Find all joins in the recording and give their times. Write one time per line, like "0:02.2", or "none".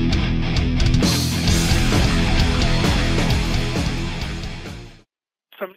0:04.4